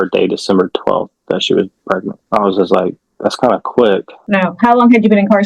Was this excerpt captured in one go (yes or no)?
no